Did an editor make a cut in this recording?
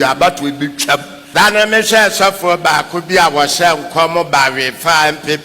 yes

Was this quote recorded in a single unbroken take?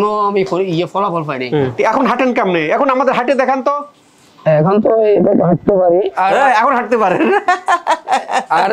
no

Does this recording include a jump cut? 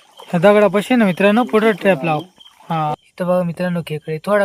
yes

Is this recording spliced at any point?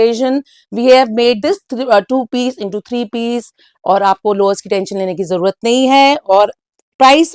no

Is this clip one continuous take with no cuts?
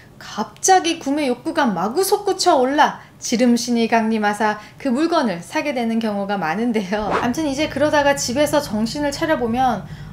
no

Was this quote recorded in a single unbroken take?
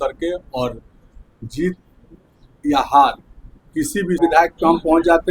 no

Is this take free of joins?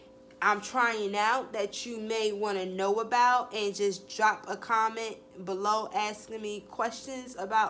yes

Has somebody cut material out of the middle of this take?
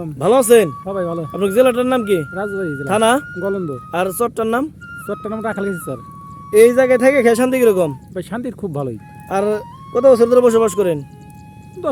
no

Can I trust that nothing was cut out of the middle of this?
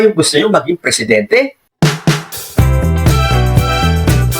no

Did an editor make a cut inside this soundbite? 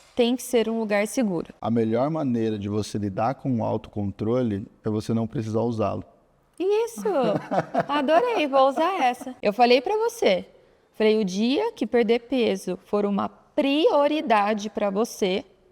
yes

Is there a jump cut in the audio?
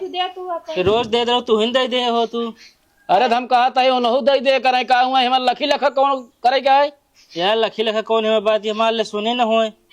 no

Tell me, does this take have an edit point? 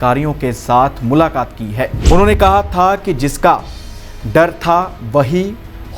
yes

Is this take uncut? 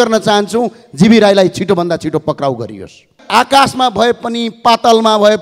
no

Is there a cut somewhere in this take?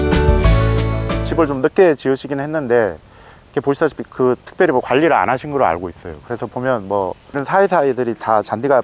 yes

